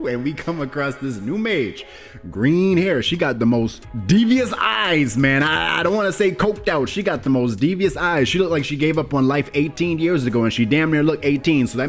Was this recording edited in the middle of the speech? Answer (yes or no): no